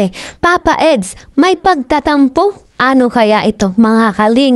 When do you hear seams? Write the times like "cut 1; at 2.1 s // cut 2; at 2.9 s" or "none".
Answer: none